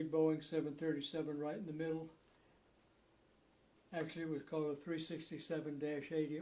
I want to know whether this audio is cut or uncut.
uncut